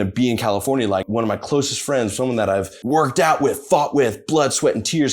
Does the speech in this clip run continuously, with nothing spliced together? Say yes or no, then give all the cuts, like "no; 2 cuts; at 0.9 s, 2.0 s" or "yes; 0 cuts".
no; 2 cuts; at 1.1 s, 2.7 s